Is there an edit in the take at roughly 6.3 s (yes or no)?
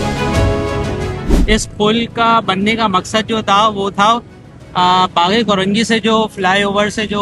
no